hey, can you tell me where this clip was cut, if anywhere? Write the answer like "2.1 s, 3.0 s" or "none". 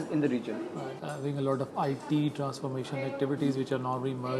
1.0 s